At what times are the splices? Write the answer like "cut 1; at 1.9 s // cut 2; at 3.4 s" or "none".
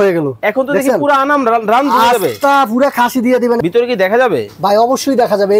cut 1; at 3.6 s